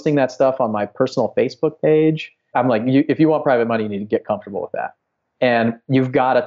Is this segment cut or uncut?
cut